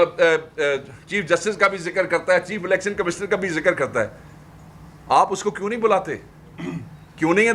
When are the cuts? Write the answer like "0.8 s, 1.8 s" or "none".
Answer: none